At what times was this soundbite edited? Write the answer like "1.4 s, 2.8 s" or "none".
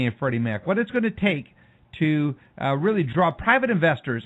1.0 s